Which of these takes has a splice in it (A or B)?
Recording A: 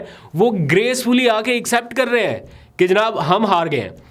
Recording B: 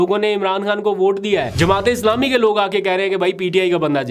B